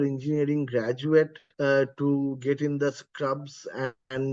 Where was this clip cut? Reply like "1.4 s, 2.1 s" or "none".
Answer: 1.4 s